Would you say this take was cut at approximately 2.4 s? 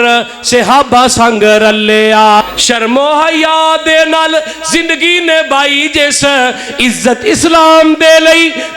yes; 1 cut; at 2.4 s

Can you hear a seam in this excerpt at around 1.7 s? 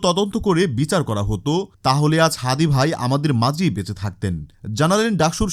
no; 0 cuts

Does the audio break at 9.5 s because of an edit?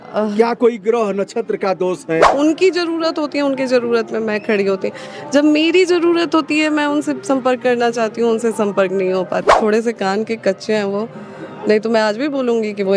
yes; 2 cuts; at 2.3 s, 9.5 s

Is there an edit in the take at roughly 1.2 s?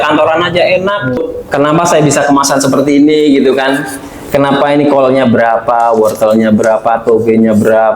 yes; 1 cut; at 1.2 s

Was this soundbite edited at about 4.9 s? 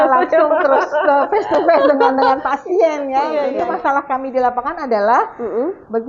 no; 1 cut; at 3.5 s

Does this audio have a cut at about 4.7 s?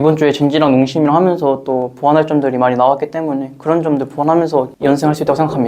yes; 1 cut; at 4.7 s

